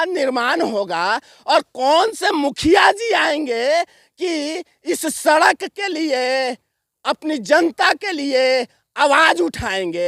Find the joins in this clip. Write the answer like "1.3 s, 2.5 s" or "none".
none